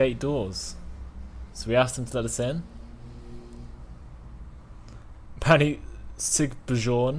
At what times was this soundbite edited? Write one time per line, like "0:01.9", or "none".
none